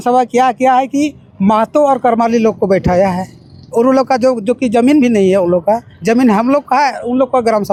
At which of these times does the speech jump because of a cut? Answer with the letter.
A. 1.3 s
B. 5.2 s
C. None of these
C